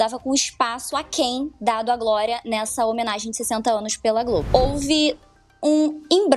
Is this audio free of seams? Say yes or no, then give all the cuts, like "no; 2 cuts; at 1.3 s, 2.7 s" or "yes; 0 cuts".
no; 1 cut; at 4.5 s